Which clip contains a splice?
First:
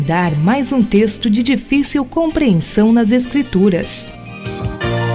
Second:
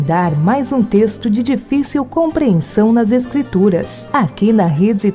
first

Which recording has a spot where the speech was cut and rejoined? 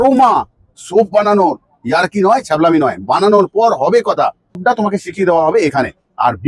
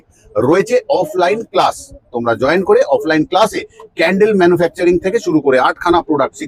first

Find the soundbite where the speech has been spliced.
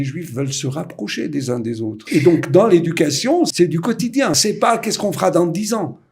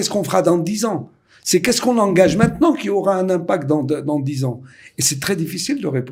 first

